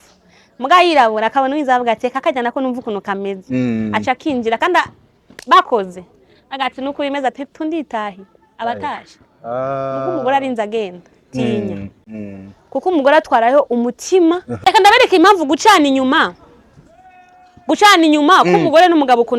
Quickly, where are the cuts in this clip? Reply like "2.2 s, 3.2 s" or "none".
14.6 s

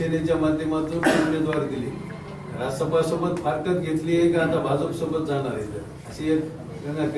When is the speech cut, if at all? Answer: none

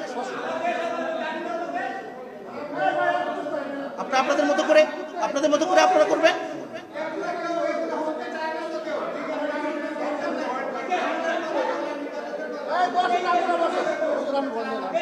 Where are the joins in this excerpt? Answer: none

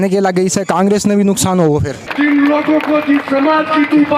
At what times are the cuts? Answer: 2.0 s

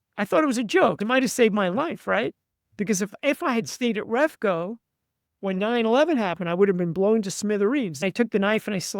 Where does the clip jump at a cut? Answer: 1.0 s, 8.0 s

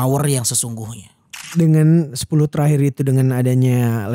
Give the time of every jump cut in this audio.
1.4 s

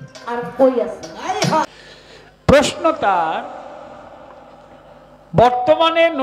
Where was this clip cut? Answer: 1.7 s

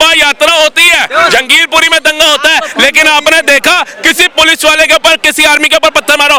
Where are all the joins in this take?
none

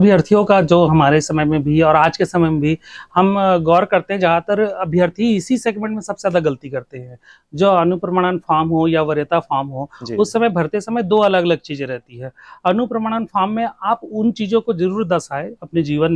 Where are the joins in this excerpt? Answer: none

